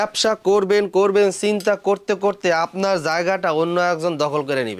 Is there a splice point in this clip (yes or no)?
no